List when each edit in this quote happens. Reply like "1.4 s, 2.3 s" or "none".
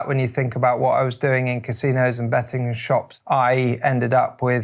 3.1 s